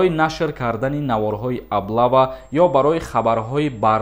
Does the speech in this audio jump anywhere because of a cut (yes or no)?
no